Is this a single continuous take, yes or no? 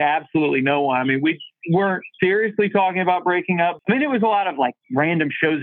no